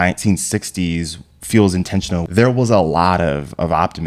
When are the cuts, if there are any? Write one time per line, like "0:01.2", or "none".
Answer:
0:02.2